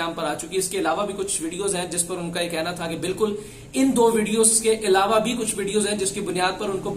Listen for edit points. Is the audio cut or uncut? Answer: uncut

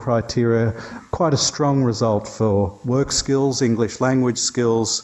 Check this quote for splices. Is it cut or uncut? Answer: uncut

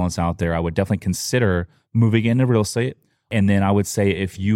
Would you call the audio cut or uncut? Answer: cut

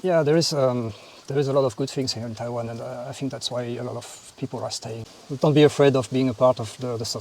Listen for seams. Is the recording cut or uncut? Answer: cut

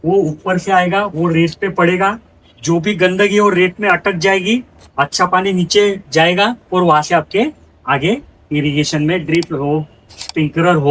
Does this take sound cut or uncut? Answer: uncut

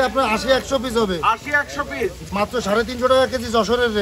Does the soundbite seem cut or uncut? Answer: cut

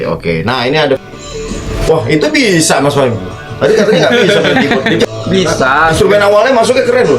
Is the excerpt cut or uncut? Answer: cut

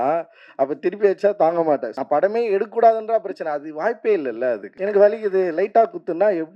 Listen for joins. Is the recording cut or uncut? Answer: cut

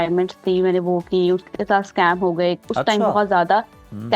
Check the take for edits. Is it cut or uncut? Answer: uncut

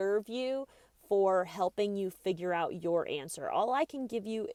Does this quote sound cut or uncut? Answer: uncut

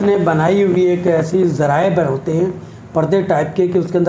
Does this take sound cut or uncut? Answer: uncut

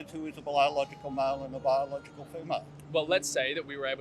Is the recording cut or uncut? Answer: uncut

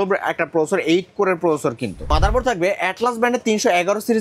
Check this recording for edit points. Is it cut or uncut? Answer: cut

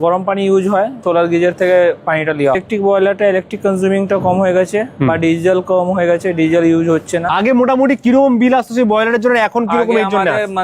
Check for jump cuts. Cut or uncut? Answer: cut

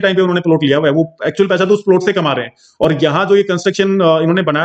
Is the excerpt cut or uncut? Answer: uncut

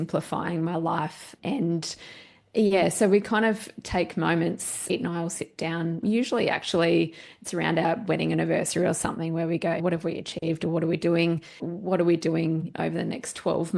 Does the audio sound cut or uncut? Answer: cut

